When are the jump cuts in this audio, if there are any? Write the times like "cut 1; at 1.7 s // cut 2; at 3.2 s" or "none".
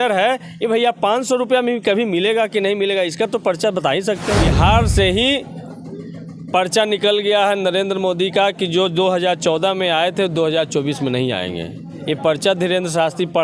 cut 1; at 4.5 s // cut 2; at 11.8 s